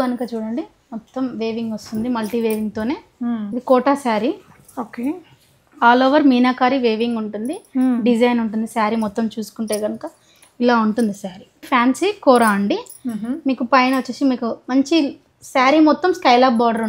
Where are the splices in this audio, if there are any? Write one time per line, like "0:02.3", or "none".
0:03.5
0:11.6

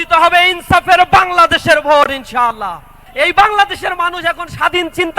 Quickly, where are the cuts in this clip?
0:03.0

